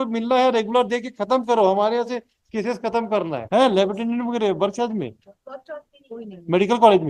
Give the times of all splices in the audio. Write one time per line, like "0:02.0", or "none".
0:03.4